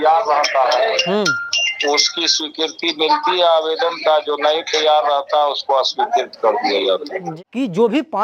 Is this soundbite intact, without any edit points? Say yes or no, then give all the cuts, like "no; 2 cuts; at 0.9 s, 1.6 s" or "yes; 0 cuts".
no; 1 cut; at 7.1 s